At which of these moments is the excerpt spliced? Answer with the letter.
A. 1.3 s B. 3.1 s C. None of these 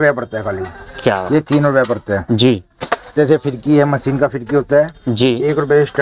B